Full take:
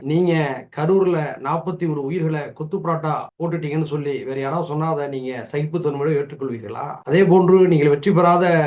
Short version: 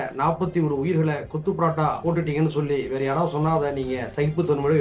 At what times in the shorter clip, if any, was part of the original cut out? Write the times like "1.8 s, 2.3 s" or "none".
2.0 s